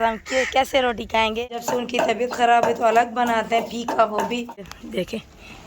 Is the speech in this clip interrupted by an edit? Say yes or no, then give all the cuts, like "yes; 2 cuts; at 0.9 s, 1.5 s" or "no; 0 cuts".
yes; 2 cuts; at 1.6 s, 4.7 s